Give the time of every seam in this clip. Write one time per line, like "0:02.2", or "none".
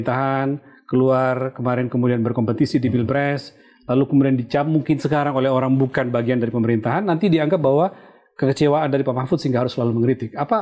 none